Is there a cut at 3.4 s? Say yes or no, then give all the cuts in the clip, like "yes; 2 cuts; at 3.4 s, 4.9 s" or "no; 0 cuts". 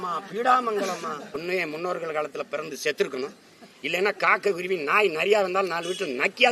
no; 1 cut; at 1.3 s